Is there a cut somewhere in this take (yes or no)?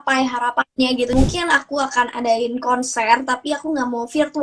yes